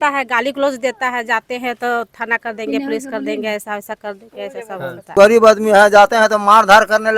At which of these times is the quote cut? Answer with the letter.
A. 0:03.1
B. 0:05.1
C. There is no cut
B